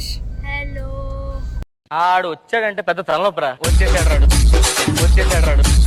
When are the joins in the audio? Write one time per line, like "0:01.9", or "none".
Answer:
none